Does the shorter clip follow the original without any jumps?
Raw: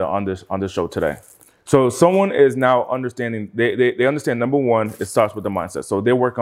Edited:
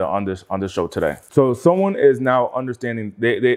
no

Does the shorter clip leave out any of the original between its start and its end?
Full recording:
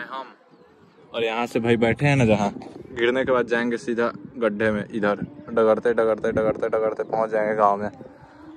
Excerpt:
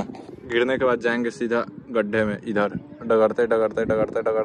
no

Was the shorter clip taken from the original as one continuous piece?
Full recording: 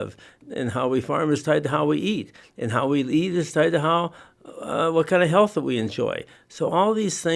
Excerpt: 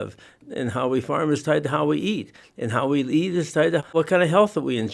no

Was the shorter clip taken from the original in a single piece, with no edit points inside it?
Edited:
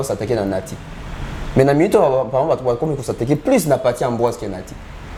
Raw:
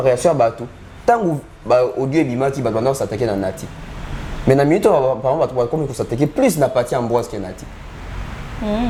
yes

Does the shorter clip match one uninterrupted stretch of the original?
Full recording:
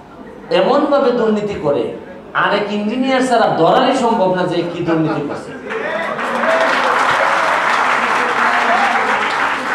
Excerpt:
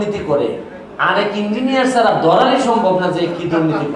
yes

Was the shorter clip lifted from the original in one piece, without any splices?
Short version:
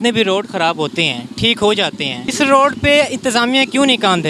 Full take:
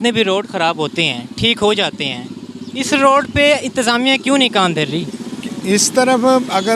no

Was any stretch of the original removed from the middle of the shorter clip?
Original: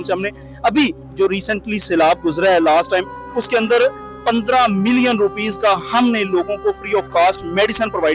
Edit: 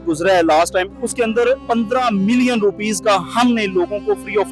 yes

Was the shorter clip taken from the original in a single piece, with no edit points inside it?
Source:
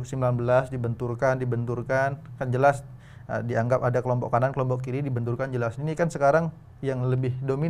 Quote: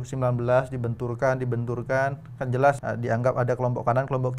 no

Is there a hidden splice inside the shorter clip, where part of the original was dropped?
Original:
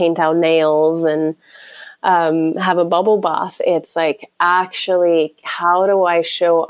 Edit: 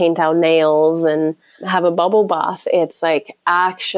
yes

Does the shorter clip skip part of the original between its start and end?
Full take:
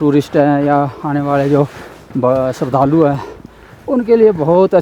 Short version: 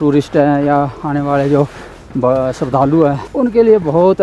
yes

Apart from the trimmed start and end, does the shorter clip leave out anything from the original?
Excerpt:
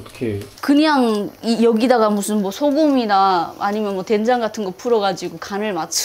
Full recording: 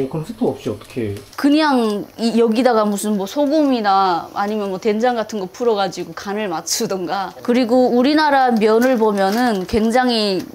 no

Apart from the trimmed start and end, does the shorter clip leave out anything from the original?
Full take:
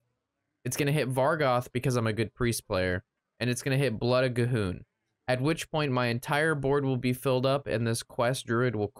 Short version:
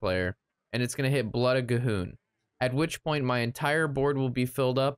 no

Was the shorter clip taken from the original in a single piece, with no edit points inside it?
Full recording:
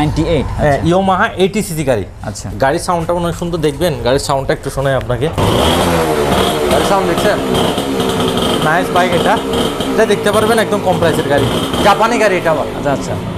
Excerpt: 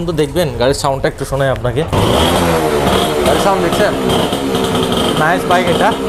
yes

